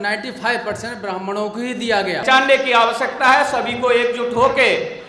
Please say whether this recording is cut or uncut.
cut